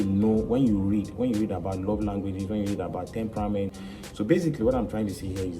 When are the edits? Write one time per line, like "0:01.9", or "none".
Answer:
0:03.7